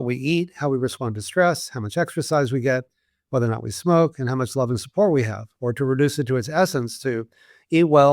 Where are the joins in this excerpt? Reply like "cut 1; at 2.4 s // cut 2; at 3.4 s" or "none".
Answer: none

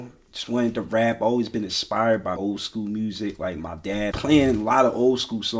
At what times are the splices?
cut 1; at 2.4 s // cut 2; at 4.1 s

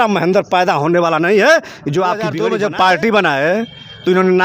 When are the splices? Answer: cut 1; at 2.4 s

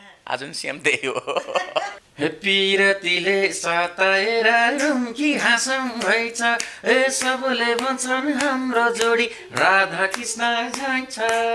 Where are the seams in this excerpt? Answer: cut 1; at 1.9 s

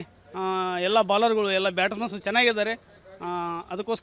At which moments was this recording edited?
none

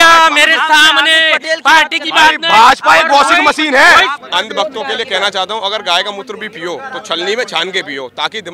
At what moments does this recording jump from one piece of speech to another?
cut 1; at 4.1 s

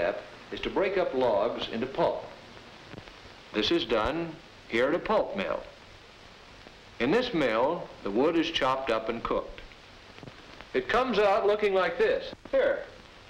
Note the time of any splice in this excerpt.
none

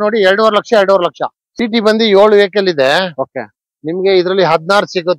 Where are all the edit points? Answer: cut 1; at 1.4 s

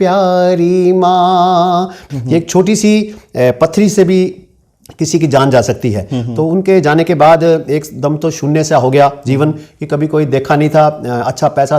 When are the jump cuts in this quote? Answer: cut 1; at 2.1 s

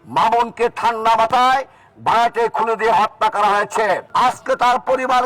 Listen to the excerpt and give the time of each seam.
cut 1; at 4.1 s

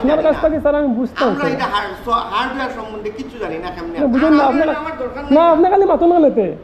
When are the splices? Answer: cut 1; at 4.0 s

